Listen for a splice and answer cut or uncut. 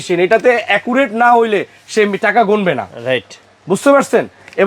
uncut